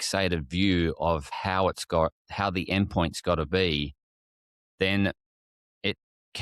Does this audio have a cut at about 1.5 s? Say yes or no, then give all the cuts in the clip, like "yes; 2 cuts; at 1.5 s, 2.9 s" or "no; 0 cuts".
no; 0 cuts